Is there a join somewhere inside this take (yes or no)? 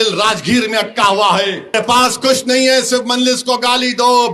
yes